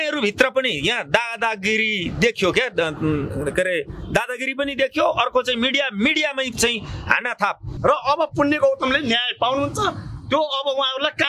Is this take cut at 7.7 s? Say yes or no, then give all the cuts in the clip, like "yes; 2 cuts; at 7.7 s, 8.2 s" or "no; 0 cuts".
yes; 1 cut; at 7.7 s